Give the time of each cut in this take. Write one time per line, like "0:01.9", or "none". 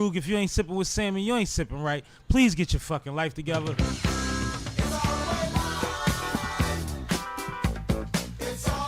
0:03.7